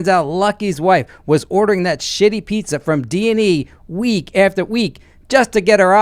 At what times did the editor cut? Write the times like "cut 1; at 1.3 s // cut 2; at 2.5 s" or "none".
none